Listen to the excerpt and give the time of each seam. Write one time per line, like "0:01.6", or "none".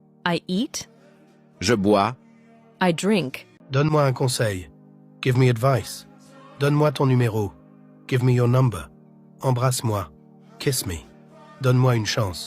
0:03.7